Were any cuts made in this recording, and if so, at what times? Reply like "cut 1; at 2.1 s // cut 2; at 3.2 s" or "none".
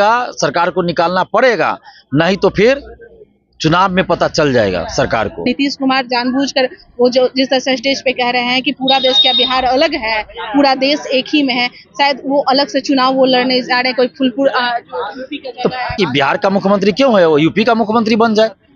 cut 1; at 5.5 s // cut 2; at 15.9 s